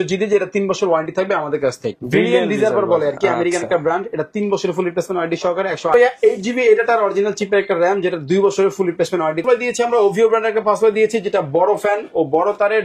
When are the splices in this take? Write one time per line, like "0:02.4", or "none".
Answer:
0:02.0
0:05.9
0:09.4